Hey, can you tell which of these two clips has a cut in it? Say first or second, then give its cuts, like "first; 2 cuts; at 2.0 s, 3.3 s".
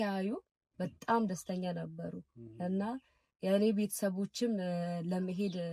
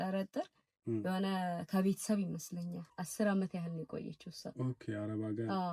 second; 1 cut; at 3.0 s